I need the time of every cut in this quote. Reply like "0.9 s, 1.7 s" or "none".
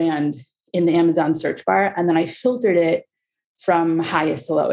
none